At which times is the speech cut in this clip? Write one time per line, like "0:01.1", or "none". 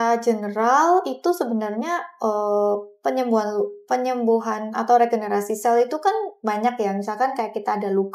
none